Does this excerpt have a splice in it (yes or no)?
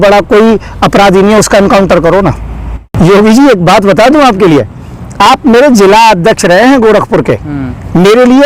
yes